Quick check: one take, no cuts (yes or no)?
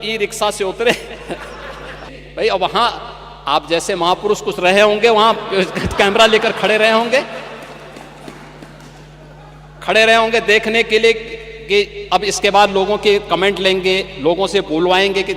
no